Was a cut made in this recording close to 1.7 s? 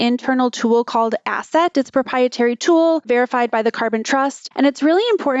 no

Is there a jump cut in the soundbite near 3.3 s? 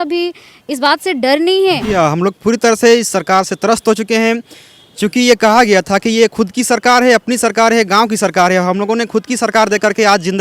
no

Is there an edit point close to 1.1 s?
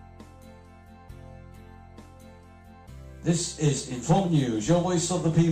no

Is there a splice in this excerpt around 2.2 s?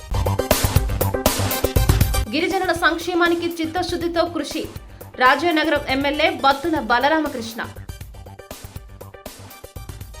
yes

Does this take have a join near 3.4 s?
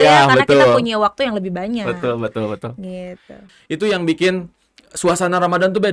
yes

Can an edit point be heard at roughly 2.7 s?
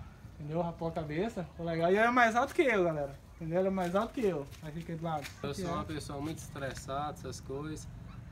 no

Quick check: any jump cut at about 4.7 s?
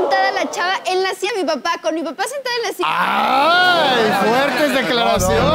no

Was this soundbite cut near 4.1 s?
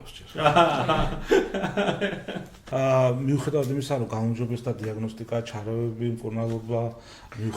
no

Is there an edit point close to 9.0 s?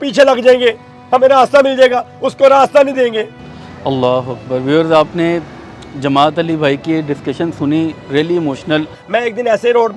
yes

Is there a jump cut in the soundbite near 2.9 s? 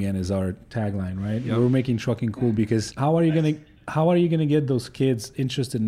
yes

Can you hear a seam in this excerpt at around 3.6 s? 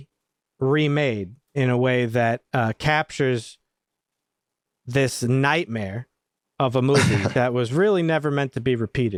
no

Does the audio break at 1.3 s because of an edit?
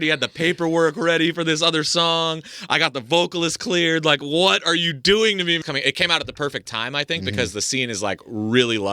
no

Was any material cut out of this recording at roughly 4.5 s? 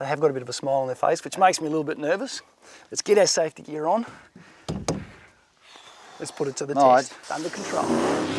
no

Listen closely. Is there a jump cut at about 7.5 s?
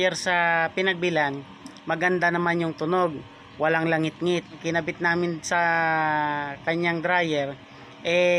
no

